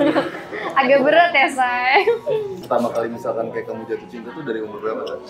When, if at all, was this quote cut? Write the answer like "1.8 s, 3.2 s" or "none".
2.6 s